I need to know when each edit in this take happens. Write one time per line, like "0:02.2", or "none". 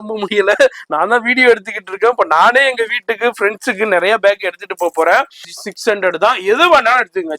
0:05.5